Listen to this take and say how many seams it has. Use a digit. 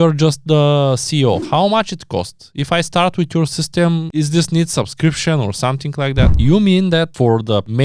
3